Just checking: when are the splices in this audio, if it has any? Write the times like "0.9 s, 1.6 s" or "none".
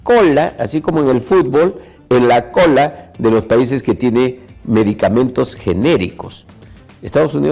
none